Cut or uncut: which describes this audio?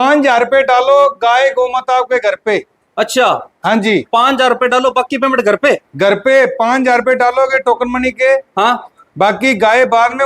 uncut